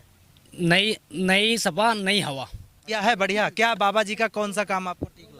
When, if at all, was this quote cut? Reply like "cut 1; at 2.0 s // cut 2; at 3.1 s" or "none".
cut 1; at 3.0 s